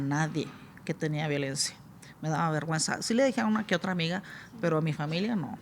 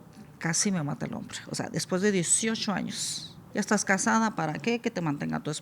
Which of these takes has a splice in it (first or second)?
second